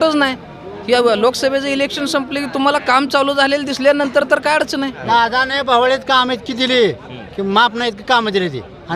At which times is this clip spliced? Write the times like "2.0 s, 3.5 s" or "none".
5.0 s